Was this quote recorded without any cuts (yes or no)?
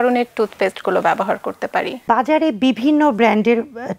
yes